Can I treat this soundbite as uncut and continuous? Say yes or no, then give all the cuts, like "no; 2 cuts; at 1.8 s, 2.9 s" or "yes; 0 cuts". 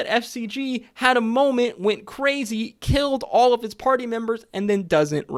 yes; 0 cuts